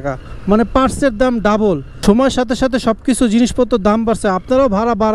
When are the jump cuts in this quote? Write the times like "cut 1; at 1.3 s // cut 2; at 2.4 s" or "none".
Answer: cut 1; at 1.9 s